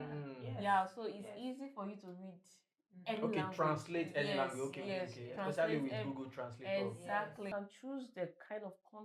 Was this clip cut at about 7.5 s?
yes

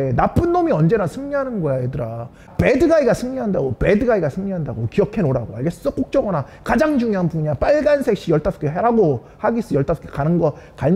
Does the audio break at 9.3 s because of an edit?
no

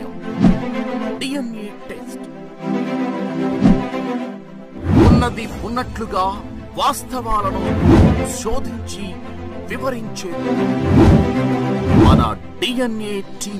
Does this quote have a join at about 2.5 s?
no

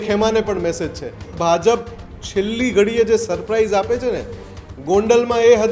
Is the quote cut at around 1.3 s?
yes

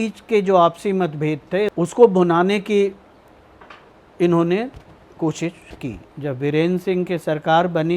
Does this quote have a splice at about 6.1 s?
yes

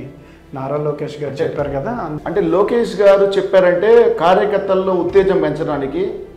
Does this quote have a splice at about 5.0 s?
no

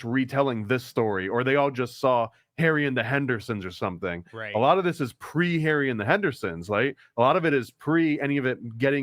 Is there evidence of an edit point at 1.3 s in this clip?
no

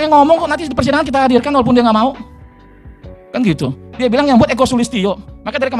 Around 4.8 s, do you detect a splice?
no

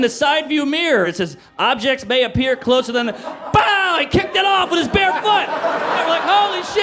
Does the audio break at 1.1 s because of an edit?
yes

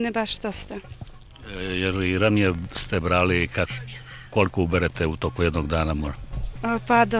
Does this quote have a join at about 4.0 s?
no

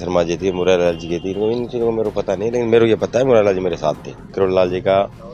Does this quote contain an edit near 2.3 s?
no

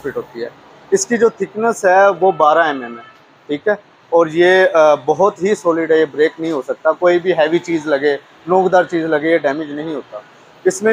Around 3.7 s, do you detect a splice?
no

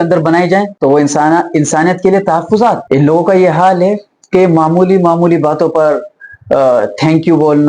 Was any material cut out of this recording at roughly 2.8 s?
yes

